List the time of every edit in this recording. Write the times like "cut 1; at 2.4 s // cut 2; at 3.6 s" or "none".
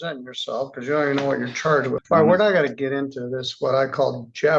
cut 1; at 2.0 s